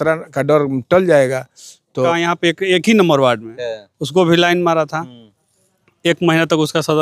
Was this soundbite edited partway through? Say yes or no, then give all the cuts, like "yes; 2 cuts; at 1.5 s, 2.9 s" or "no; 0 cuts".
yes; 1 cut; at 2.1 s